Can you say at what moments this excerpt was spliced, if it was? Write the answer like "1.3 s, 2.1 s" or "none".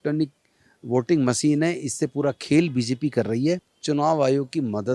3.7 s